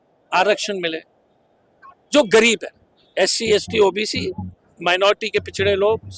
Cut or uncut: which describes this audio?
uncut